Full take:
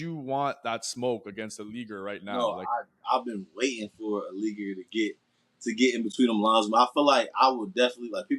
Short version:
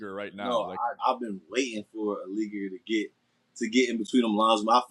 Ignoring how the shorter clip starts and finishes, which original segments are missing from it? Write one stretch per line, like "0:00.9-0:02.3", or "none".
0:02.8-0:03.0